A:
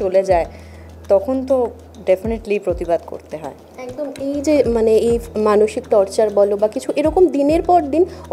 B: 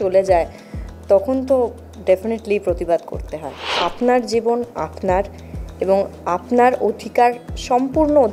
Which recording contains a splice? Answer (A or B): B